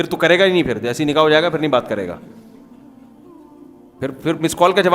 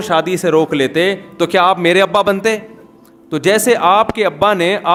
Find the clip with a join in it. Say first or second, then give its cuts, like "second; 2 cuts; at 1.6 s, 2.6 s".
first; 2 cuts; at 2.2 s, 3.8 s